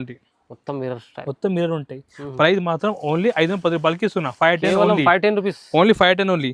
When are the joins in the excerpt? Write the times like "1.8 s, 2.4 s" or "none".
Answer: none